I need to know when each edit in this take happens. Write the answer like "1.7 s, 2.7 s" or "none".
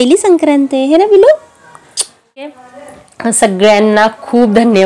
2.7 s